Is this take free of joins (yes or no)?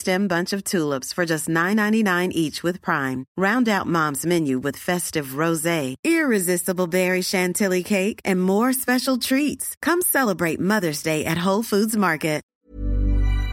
no